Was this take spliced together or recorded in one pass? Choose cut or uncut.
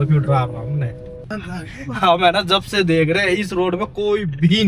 cut